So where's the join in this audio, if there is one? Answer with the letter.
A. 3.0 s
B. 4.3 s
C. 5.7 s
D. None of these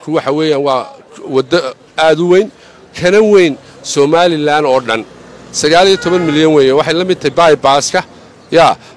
D